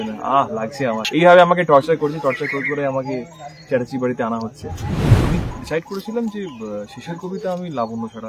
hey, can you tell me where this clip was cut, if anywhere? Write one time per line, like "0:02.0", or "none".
0:01.1
0:05.1